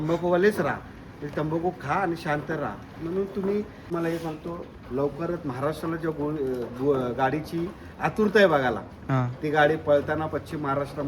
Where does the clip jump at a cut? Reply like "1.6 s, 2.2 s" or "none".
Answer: 3.9 s